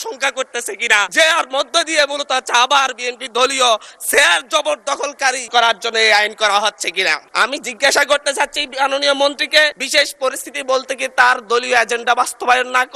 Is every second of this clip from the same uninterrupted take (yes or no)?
no